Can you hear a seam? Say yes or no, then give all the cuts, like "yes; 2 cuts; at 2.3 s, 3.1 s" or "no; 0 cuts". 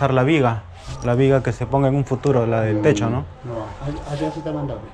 no; 0 cuts